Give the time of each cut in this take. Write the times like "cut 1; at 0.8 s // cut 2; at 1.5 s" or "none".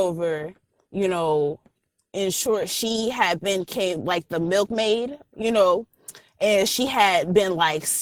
none